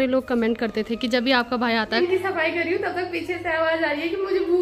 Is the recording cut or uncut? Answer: cut